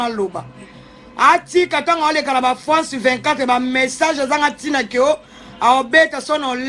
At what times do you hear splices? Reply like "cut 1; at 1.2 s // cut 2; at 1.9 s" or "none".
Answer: none